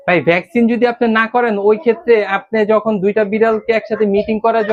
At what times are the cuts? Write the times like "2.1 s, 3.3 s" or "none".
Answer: none